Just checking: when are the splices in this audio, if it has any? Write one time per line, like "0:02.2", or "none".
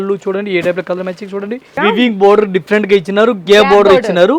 0:01.8